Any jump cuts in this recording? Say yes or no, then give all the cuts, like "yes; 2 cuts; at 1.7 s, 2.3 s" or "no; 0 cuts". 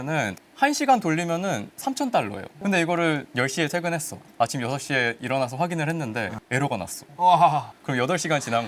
no; 0 cuts